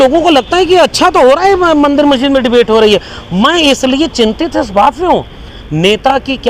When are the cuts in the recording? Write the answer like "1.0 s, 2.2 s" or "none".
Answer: none